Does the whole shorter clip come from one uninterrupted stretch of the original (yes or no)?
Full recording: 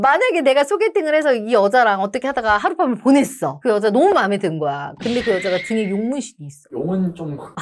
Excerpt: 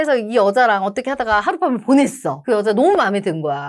yes